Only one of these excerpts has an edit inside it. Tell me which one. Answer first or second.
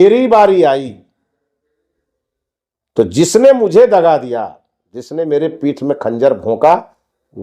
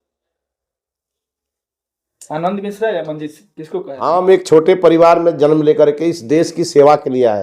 second